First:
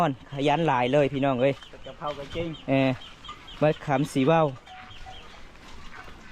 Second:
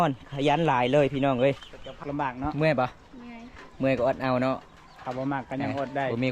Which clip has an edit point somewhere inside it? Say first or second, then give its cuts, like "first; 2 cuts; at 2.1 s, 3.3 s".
second; 1 cut; at 2.0 s